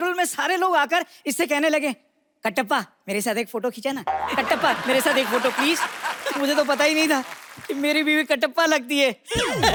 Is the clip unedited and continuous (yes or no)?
yes